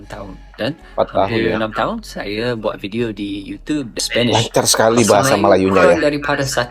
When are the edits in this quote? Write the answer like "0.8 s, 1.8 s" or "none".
4.0 s

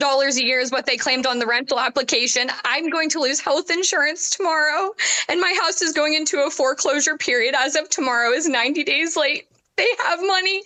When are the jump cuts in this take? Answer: none

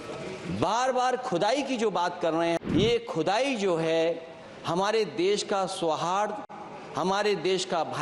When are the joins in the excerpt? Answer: 2.6 s

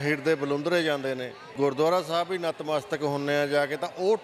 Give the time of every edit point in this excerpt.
1.5 s

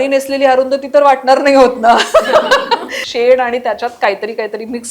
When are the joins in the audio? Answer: 3.0 s

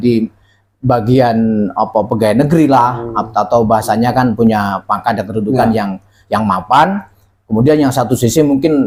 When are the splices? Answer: none

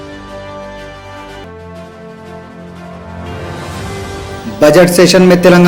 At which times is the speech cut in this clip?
none

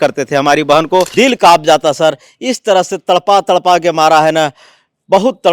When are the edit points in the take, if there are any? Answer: 1.1 s

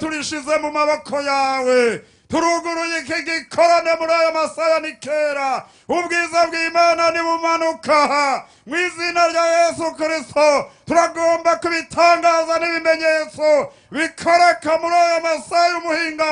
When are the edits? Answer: none

